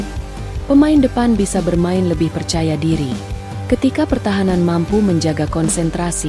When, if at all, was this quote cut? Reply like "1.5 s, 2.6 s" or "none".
none